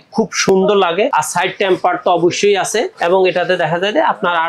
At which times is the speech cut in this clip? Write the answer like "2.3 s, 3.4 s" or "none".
1.1 s, 2.9 s